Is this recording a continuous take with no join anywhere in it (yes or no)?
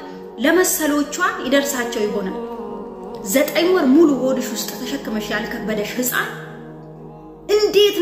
yes